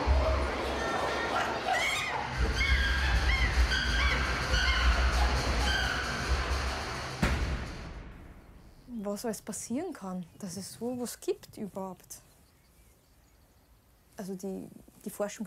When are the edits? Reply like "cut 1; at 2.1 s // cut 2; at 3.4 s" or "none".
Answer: none